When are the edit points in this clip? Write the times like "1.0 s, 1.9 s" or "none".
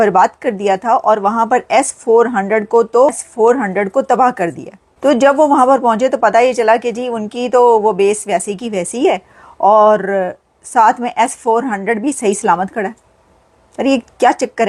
13.0 s